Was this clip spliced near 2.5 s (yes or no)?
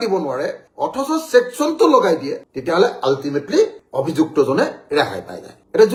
no